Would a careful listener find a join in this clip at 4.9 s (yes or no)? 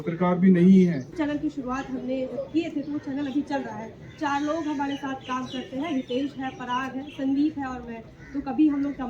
no